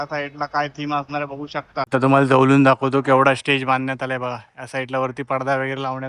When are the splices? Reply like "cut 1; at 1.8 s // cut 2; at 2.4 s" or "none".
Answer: cut 1; at 1.9 s

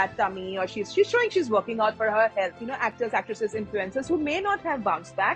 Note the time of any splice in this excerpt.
cut 1; at 2.5 s

